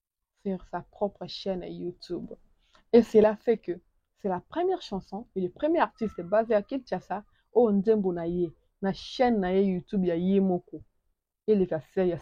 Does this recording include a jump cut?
no; 0 cuts

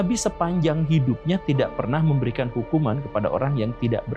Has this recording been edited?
no; 0 cuts

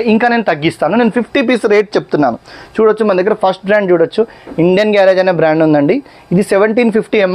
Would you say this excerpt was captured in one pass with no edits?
yes; 0 cuts

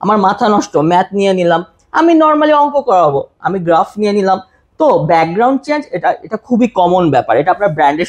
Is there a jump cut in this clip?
no; 0 cuts

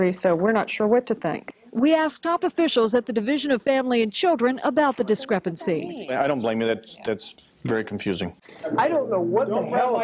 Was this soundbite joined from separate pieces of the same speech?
yes; 1 cut; at 8.4 s

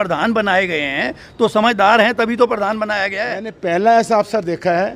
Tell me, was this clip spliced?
yes; 1 cut; at 3.5 s

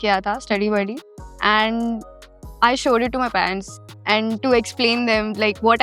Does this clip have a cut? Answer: yes; 1 cut; at 3.7 s

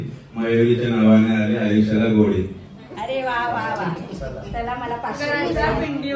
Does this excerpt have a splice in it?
yes; 1 cut; at 5.1 s

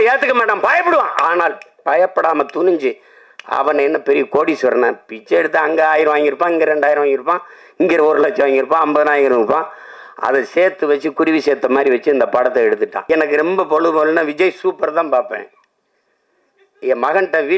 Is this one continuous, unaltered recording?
no; 1 cut; at 13.0 s

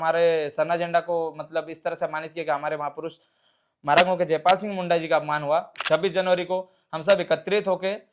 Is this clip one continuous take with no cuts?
no; 1 cut; at 5.7 s

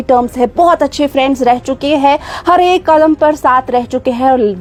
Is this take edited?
no; 0 cuts

